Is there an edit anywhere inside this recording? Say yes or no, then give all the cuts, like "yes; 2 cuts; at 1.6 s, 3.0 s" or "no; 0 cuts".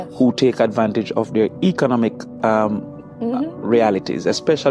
no; 0 cuts